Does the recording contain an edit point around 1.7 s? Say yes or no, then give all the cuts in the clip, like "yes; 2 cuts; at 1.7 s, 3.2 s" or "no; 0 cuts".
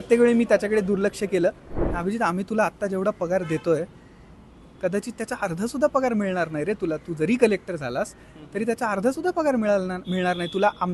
yes; 1 cut; at 1.7 s